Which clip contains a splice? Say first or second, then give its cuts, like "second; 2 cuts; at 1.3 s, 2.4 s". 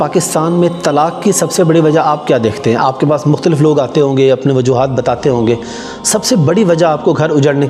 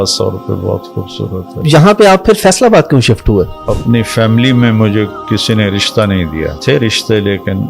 second; 3 cuts; at 1.6 s, 3.7 s, 6.6 s